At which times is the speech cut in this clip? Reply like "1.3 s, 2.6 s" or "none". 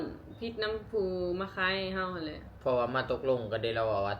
2.4 s